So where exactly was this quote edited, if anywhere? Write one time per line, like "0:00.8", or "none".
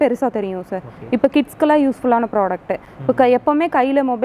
none